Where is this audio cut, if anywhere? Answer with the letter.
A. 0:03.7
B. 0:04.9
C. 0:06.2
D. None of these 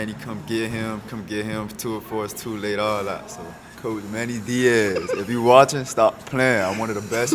A